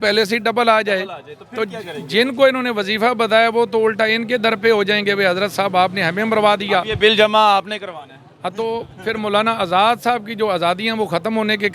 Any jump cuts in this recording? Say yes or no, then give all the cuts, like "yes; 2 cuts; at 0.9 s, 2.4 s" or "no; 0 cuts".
no; 0 cuts